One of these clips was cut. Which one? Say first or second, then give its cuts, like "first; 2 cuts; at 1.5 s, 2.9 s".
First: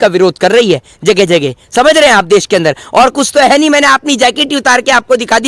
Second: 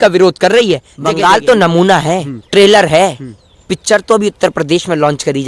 second; 2 cuts; at 0.9 s, 2.3 s